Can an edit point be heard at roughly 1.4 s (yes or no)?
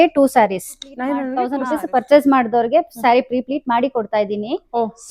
yes